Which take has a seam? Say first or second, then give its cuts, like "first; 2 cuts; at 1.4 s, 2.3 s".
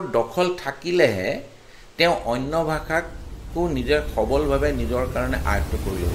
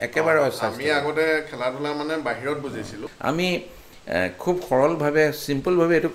second; 1 cut; at 3.0 s